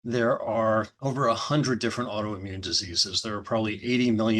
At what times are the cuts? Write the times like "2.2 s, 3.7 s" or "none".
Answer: 0.9 s